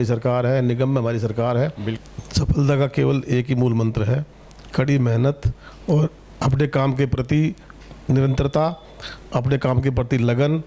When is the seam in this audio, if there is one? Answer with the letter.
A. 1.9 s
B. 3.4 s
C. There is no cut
A